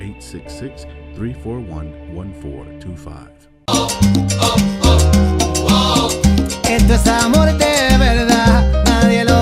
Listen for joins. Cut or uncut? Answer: cut